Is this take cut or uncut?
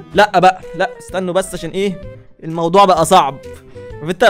uncut